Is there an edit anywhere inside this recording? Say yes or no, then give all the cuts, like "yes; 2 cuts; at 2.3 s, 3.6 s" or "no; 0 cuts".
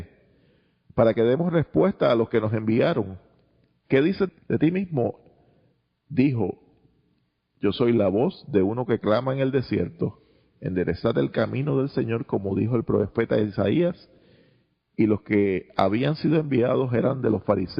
yes; 1 cut; at 13.7 s